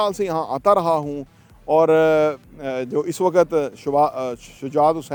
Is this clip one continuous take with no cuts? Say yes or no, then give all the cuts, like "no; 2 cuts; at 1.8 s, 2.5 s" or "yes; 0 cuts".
yes; 0 cuts